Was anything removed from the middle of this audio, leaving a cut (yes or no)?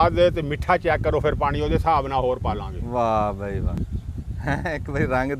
no